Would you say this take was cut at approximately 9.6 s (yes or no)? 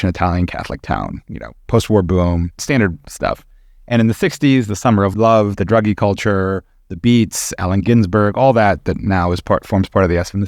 no